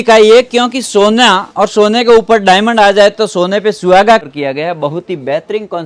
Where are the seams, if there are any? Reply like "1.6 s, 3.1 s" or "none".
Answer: 4.2 s